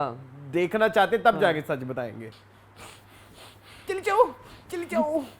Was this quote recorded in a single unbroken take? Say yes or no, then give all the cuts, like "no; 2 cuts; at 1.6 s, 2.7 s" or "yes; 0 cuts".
no; 1 cut; at 2.3 s